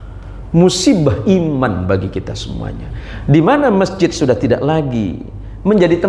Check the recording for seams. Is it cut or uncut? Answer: uncut